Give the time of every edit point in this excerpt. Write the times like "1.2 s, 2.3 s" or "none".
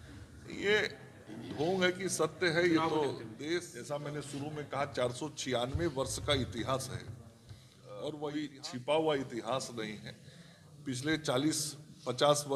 3.8 s, 8.3 s